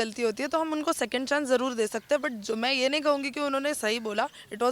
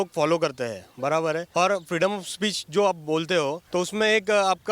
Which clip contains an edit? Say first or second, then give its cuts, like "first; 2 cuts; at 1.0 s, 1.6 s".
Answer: second; 2 cuts; at 1.4 s, 3.6 s